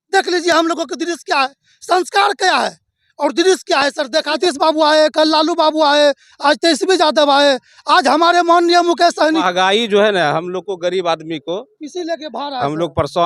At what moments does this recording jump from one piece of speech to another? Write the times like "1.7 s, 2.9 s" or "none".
4.4 s, 9.5 s